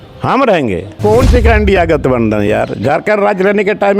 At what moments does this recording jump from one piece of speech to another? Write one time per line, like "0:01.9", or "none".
0:01.0